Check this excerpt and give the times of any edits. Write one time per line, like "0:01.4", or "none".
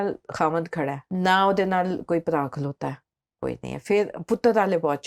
0:01.0

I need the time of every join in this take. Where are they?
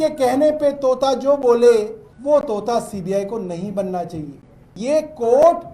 0:02.1
0:04.7

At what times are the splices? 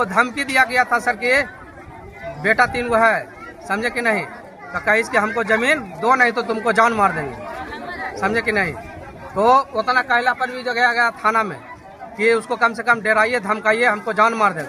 none

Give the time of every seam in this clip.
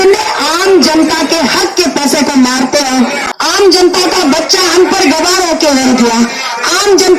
0:03.2

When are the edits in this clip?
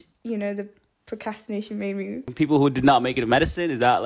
0:02.3

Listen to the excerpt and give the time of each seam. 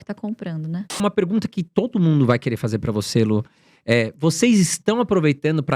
0:01.0

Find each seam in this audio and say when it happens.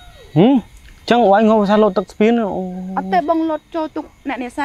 none

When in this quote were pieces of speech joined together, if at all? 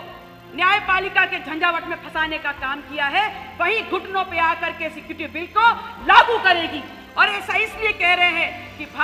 none

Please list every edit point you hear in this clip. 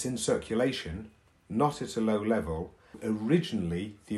0:03.0

